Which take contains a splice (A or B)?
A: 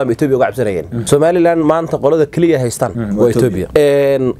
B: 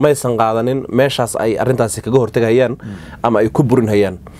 A